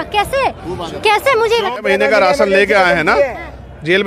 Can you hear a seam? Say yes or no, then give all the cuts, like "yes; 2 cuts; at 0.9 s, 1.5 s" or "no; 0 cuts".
yes; 1 cut; at 1.7 s